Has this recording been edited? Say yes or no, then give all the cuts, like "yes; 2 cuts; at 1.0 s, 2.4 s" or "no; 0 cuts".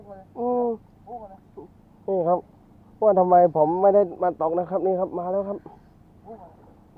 no; 0 cuts